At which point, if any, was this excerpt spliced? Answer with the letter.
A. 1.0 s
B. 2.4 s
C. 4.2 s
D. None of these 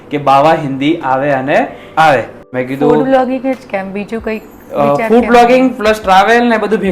B